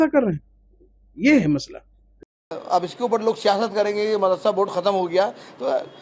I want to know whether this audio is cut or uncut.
cut